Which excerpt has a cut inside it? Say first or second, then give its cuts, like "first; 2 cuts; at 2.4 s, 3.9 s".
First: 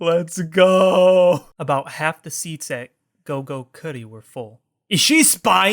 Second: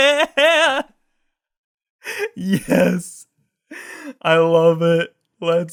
first; 1 cut; at 1.5 s